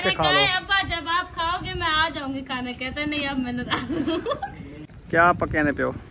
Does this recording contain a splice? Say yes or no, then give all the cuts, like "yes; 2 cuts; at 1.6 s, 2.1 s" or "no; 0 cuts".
yes; 1 cut; at 4.6 s